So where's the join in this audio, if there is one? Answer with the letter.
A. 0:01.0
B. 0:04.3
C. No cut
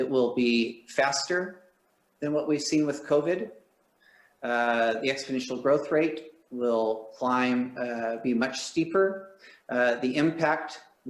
C